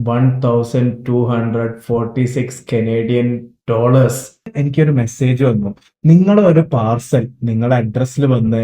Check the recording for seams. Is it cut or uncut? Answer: cut